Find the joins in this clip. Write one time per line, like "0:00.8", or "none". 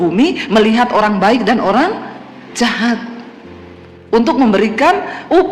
none